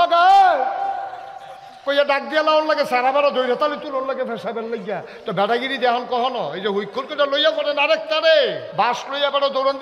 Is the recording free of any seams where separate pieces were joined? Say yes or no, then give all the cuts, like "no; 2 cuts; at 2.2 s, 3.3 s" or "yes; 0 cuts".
no; 1 cut; at 8.7 s